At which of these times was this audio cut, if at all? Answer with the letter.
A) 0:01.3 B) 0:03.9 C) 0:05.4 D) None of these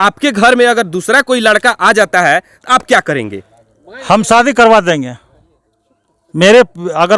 D